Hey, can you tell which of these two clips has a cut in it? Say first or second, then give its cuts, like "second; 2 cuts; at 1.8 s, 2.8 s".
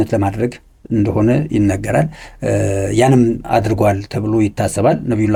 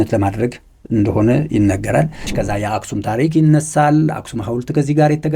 second; 1 cut; at 2.3 s